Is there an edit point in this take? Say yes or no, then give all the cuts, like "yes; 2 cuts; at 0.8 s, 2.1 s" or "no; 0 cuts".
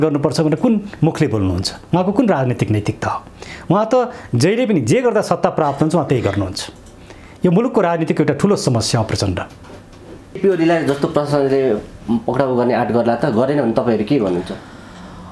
no; 0 cuts